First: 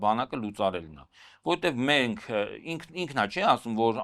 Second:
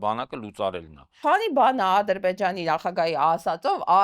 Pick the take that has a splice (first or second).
second